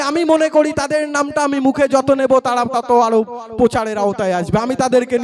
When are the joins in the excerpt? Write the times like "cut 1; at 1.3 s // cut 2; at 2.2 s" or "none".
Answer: none